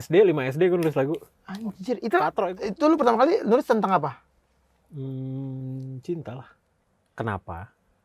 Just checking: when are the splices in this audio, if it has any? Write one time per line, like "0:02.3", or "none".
0:02.4
0:06.7